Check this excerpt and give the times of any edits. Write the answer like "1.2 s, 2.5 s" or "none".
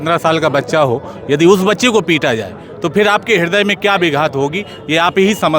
none